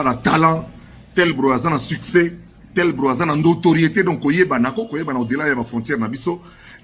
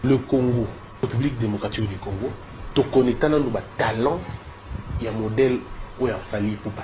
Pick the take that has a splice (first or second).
second